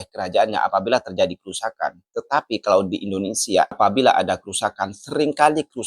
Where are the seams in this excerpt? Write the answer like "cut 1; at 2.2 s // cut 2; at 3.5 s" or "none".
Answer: cut 1; at 3.8 s